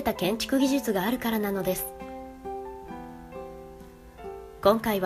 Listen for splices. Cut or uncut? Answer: cut